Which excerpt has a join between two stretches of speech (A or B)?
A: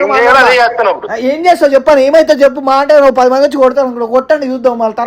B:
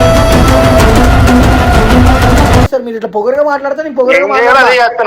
B